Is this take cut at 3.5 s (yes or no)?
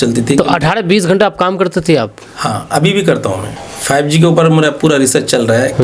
yes